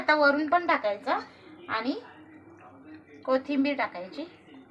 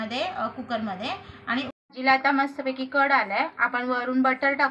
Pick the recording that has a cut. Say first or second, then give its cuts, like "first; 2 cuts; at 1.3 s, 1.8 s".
second; 1 cut; at 1.8 s